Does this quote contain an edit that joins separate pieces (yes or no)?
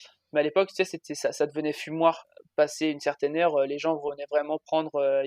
yes